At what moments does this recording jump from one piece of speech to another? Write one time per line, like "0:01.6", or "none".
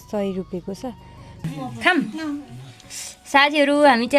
0:01.4